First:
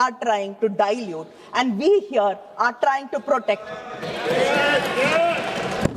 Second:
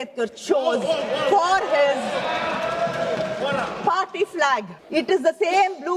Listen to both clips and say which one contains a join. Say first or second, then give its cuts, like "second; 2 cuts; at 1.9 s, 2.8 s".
second; 1 cut; at 4.8 s